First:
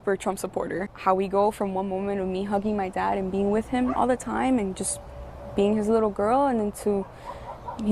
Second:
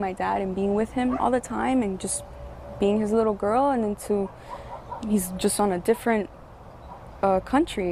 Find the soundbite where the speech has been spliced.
first; 1 cut; at 0.9 s

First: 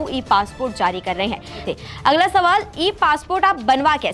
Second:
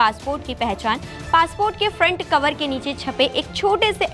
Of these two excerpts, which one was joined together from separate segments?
first; 1 cut; at 1.7 s

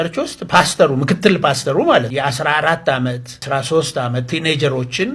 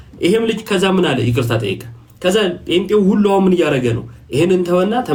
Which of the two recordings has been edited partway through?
first; 2 cuts; at 2.1 s, 3.4 s

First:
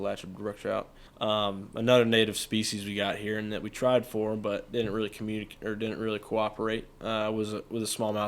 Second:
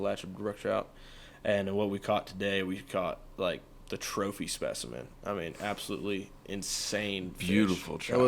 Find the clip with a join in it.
first; 1 cut; at 1.0 s

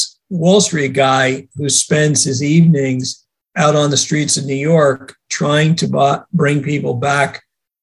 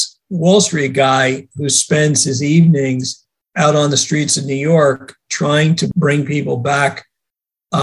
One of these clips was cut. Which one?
second; 1 cut; at 5.9 s

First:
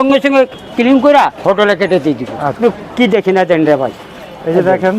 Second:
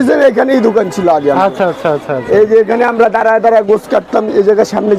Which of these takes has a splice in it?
first; 1 cut; at 2.6 s

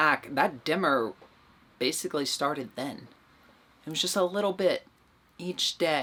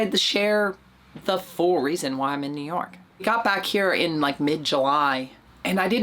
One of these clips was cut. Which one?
second; 1 cut; at 3.0 s

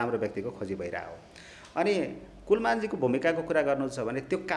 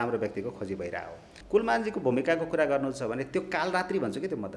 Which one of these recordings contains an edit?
second; 1 cut; at 1.3 s

